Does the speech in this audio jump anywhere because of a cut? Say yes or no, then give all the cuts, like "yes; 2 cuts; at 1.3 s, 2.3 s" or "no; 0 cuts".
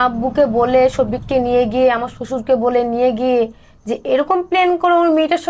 no; 0 cuts